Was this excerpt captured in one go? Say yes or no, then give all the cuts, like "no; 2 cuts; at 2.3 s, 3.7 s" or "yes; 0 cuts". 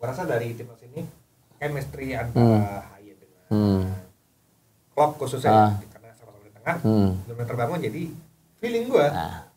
yes; 0 cuts